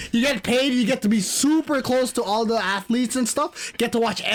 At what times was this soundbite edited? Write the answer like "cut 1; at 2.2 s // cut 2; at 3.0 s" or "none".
none